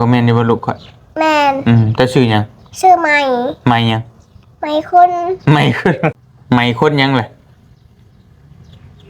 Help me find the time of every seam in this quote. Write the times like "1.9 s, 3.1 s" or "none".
6.3 s